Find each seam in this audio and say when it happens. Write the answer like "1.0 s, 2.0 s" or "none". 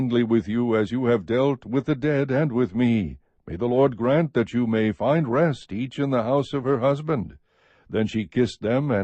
1.9 s